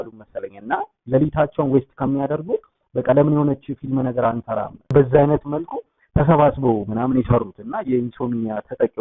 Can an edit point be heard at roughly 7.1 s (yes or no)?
no